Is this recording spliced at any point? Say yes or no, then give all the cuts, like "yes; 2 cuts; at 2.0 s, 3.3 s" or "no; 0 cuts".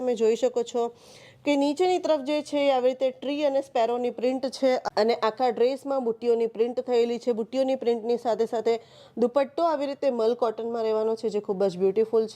yes; 1 cut; at 4.9 s